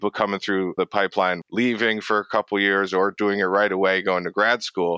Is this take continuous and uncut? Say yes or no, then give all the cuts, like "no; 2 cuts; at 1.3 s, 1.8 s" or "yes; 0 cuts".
no; 1 cut; at 1.0 s